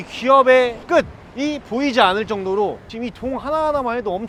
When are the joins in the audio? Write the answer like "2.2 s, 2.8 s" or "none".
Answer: none